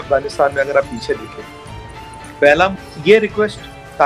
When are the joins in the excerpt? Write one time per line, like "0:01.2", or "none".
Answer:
0:02.7